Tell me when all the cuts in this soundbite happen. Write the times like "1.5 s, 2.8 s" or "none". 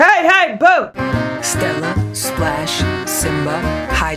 0.9 s